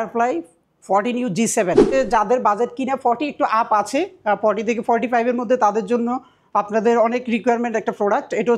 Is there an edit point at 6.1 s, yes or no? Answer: no